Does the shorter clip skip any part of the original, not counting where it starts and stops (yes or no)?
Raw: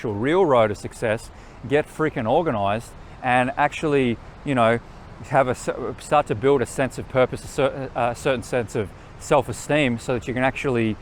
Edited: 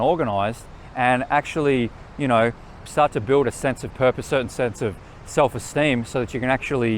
yes